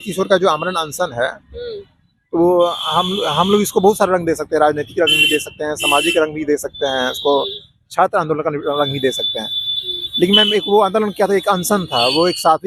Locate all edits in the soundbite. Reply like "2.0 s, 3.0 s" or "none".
none

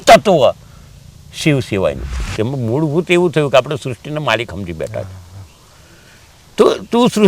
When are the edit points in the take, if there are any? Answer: 2.3 s

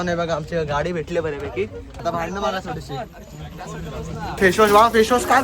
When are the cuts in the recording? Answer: 1.9 s, 4.4 s

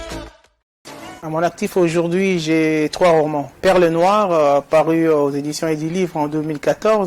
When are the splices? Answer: 0.9 s, 3.5 s

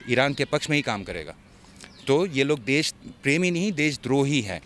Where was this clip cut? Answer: none

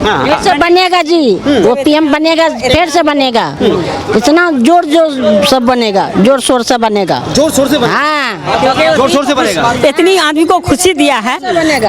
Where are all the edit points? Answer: none

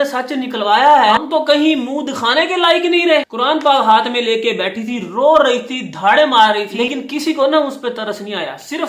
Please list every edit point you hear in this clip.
1.2 s, 3.3 s, 6.7 s

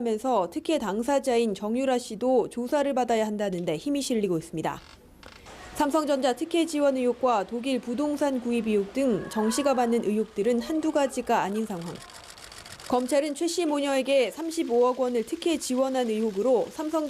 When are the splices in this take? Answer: 12.0 s

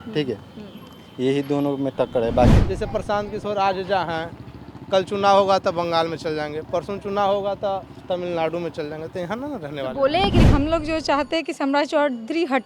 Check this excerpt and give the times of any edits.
2.6 s, 10.4 s

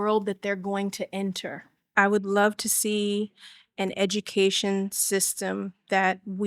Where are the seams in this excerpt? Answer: 1.8 s

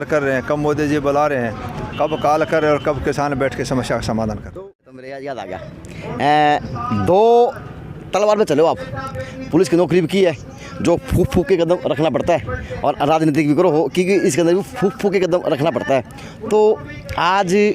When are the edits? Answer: 4.4 s

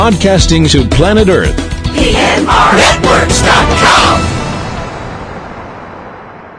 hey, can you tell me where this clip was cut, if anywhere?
none

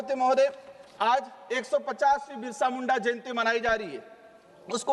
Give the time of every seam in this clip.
none

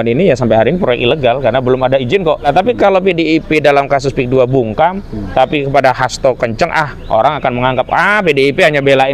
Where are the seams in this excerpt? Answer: 2.5 s

